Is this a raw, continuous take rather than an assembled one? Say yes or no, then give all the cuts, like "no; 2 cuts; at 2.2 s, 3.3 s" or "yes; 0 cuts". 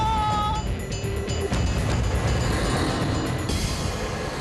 yes; 0 cuts